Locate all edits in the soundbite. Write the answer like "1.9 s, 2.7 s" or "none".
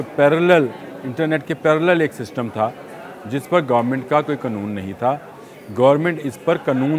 none